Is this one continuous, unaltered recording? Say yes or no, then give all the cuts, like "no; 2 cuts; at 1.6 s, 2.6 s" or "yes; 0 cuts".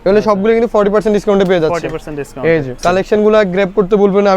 no; 1 cut; at 2.7 s